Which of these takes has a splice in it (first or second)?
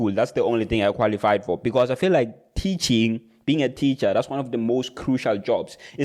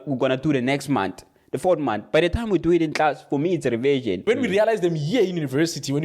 second